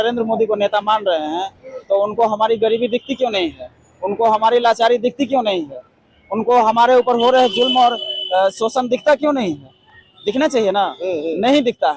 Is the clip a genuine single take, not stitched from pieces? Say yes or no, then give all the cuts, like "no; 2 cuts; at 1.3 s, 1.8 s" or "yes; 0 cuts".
yes; 0 cuts